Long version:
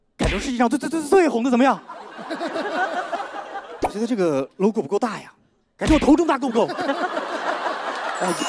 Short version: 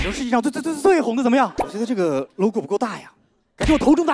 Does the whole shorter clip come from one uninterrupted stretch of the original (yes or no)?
no